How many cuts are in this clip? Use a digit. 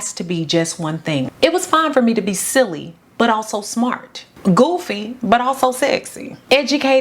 1